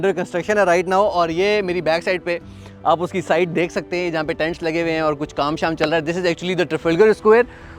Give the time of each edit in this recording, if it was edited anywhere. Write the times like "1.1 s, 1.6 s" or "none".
none